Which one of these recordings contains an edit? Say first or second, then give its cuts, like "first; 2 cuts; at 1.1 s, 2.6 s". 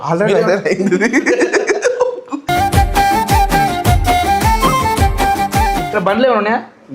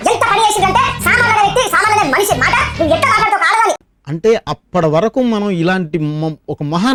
first; 1 cut; at 5.9 s